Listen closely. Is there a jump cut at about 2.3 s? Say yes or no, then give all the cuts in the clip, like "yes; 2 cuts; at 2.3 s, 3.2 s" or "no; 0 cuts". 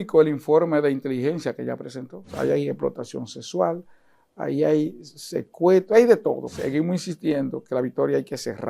yes; 2 cuts; at 2.3 s, 6.6 s